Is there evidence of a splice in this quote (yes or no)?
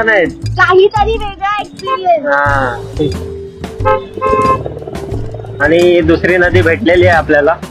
no